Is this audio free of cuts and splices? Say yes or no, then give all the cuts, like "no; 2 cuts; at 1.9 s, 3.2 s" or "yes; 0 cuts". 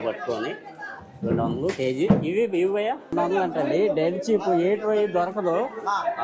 no; 1 cut; at 3.1 s